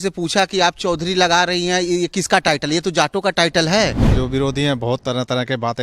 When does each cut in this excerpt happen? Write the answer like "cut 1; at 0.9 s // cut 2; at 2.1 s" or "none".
cut 1; at 4.1 s